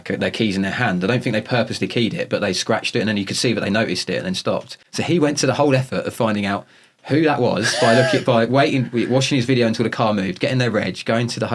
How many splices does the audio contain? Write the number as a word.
one